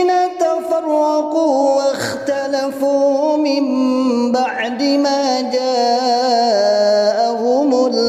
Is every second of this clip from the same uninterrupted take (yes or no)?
yes